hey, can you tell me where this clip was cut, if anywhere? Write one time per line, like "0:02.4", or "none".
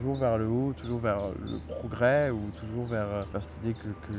0:03.3

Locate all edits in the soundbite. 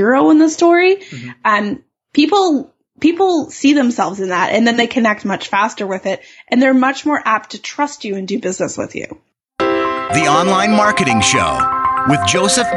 0:09.4

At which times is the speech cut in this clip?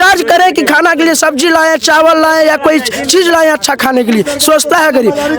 none

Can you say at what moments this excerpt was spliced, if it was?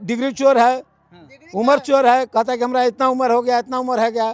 none

